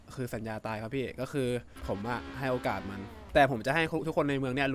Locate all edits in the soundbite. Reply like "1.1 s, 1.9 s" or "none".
1.7 s, 3.1 s